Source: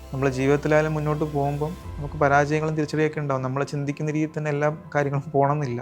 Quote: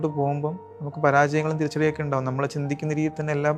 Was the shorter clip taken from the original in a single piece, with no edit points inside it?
yes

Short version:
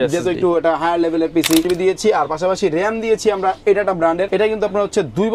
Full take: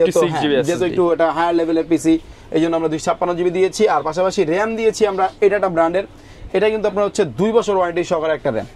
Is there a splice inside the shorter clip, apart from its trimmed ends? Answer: yes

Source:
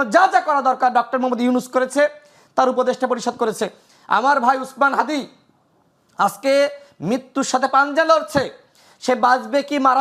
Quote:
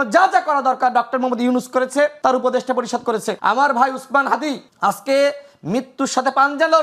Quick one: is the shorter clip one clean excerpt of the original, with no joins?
no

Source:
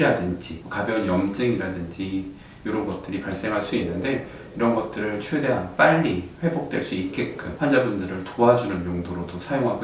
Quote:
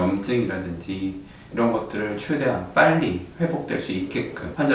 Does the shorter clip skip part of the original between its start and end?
yes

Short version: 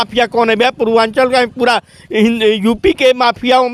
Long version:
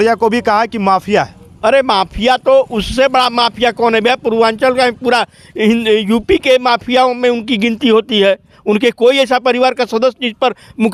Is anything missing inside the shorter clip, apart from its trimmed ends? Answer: no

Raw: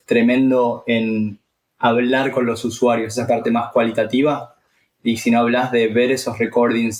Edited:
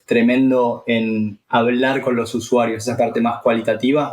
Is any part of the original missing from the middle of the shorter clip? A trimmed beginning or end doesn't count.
yes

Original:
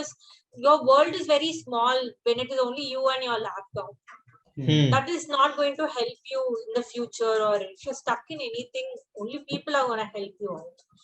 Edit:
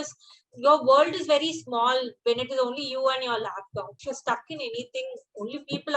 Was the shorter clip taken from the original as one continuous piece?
no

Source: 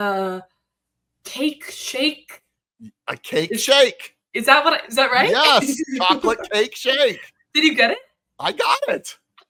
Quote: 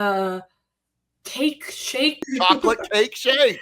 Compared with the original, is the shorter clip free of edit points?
no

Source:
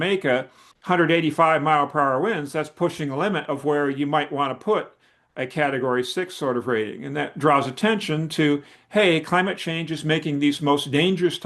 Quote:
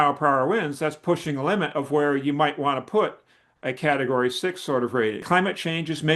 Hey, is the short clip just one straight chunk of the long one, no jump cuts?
no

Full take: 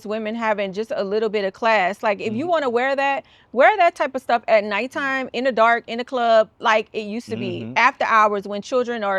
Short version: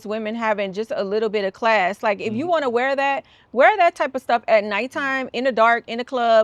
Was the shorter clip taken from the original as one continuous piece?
yes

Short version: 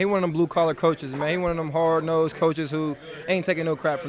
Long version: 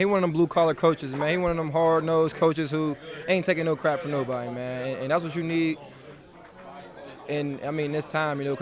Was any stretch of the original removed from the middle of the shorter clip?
no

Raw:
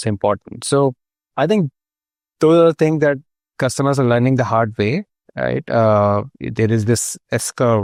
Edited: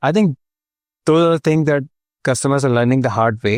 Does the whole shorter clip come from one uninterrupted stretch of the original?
yes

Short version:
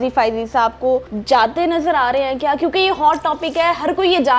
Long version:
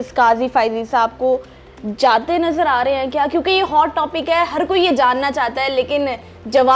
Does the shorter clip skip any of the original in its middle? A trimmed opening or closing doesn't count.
yes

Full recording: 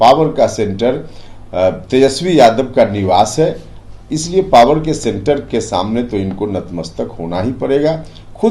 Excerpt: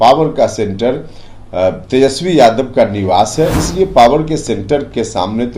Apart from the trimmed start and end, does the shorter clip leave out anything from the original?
yes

